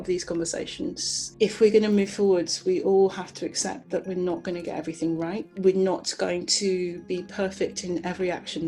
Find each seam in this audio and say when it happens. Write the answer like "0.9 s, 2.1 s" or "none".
1.3 s